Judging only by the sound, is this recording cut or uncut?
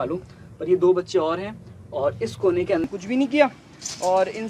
cut